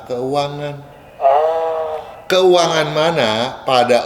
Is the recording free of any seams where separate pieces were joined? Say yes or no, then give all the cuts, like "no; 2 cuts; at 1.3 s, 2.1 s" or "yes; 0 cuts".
yes; 0 cuts